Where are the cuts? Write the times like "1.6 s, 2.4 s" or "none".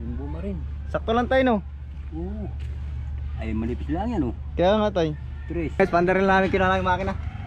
5.8 s